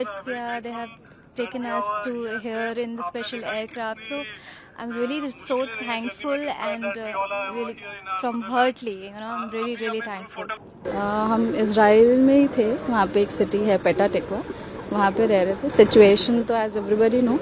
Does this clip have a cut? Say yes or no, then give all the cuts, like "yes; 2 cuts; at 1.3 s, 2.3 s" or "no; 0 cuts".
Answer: no; 0 cuts